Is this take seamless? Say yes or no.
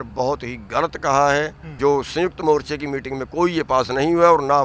no